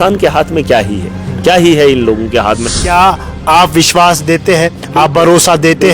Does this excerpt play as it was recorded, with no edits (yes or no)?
no